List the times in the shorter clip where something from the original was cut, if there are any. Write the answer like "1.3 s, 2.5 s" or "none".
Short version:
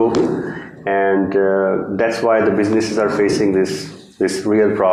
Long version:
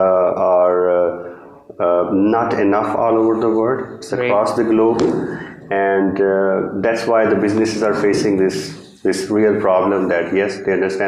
none